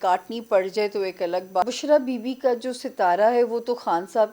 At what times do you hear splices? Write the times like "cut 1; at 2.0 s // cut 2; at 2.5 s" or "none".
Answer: cut 1; at 1.6 s